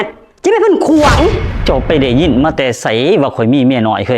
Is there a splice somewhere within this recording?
yes; 1 cut; at 1.5 s

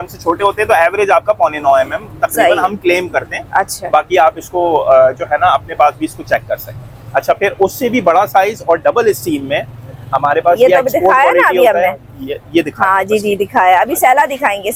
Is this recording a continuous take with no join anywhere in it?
yes; 0 cuts

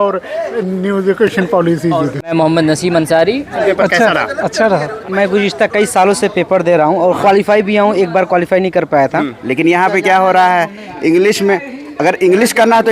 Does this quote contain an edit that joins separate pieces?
yes; 5 cuts; at 2.1 s, 3.6 s, 5.0 s, 7.2 s, 9.3 s

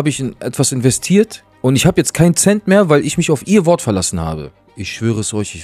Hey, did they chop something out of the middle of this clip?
yes; 2 cuts; at 1.4 s, 4.5 s

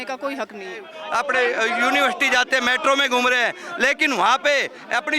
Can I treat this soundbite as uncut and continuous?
no; 1 cut; at 1.0 s

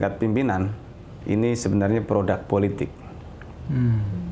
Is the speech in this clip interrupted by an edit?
no; 0 cuts

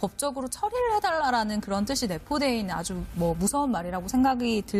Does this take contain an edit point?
no; 0 cuts

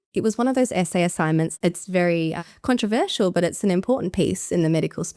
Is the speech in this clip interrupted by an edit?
yes; 1 cut; at 1.5 s

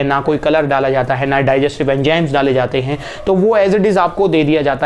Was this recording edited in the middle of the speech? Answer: no; 0 cuts

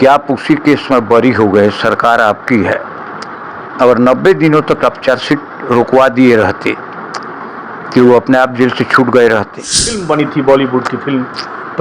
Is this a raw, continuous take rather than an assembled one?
no; 1 cut; at 10.0 s

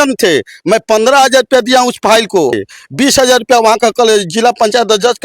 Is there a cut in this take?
yes; 1 cut; at 2.6 s

